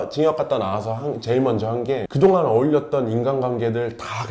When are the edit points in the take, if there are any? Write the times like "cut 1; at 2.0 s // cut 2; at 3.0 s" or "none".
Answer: none